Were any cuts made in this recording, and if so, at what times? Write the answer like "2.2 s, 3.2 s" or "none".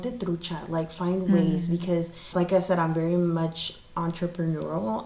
2.3 s